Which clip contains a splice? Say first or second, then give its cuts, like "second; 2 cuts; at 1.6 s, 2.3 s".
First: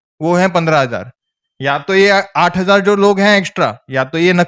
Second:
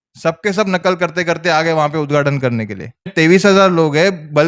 second; 1 cut; at 3.1 s